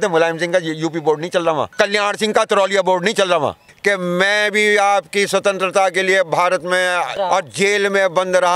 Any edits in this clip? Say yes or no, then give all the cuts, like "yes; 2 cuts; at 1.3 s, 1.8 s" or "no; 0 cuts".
yes; 3 cuts; at 1.7 s, 3.7 s, 7.1 s